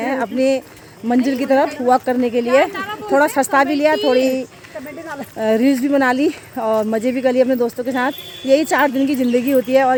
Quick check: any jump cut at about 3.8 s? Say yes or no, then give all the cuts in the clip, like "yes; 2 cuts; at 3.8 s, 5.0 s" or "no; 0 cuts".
no; 0 cuts